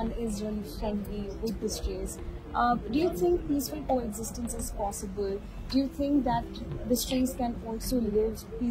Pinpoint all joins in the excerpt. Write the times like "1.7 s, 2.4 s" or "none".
none